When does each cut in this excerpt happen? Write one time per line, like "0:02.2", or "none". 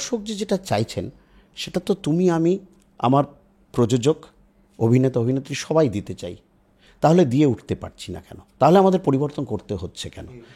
none